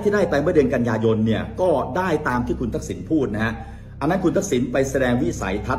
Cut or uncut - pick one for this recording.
uncut